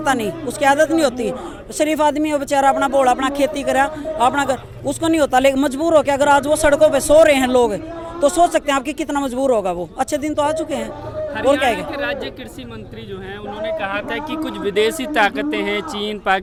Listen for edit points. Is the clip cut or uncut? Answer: uncut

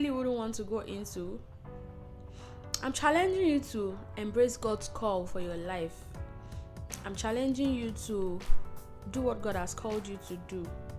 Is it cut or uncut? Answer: uncut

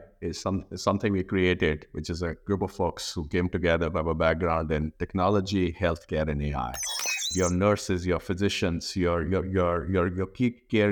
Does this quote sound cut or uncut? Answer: cut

